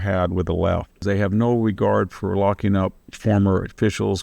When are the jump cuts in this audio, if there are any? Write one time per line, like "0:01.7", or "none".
0:01.0